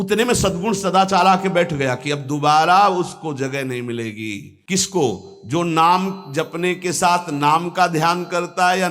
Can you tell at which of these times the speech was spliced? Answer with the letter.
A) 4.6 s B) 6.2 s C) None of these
A